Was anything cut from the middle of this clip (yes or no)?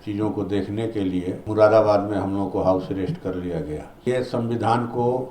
yes